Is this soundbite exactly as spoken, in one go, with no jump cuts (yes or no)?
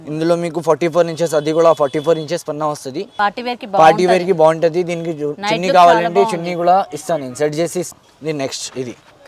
no